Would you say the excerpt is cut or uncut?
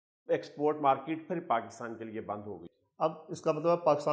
cut